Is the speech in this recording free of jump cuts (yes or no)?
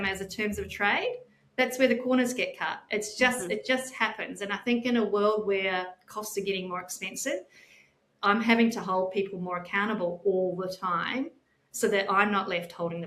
yes